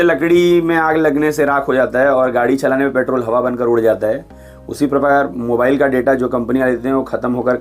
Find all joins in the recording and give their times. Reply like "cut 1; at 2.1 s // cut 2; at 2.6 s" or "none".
none